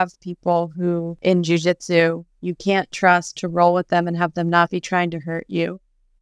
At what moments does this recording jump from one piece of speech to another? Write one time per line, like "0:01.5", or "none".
0:01.1